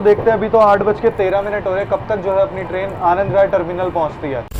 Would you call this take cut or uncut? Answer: uncut